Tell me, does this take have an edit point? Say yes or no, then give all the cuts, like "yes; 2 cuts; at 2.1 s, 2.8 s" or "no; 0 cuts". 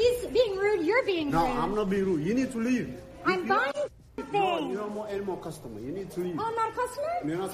no; 0 cuts